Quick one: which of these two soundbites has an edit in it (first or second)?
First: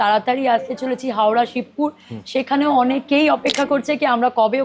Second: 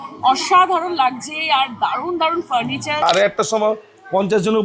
second